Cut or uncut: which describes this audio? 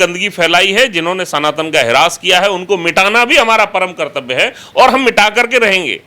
uncut